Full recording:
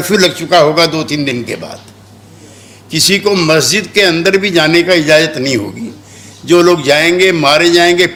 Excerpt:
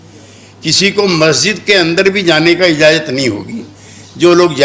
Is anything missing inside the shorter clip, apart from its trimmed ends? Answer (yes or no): no